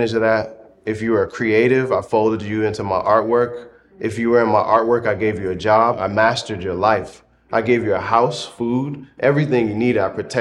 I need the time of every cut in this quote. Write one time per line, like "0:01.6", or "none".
0:06.0

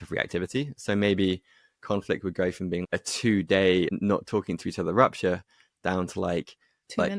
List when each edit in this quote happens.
0:02.8
0:03.9

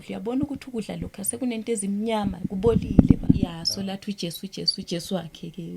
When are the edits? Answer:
0:03.6

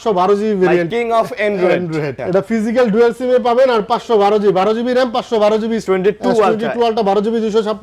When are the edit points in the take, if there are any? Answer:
0:00.9
0:02.2
0:05.8

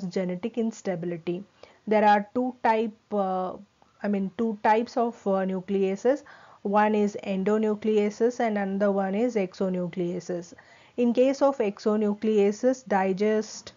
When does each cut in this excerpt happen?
none

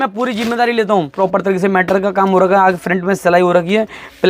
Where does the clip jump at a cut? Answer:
0:01.1

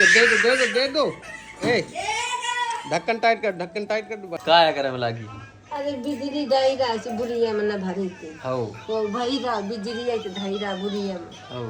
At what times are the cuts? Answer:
0:04.3

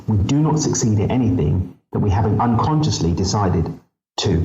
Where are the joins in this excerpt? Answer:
0:02.4

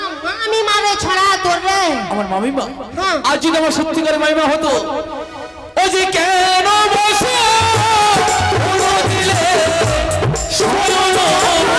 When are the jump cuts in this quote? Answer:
none

